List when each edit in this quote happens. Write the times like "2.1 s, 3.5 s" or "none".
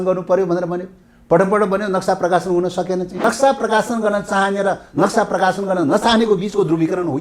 3.2 s